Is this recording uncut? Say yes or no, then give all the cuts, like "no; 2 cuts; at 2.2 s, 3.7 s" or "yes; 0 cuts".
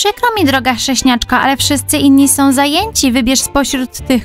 yes; 0 cuts